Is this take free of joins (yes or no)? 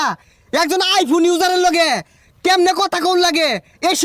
yes